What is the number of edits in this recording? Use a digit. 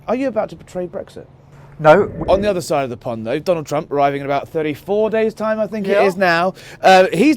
1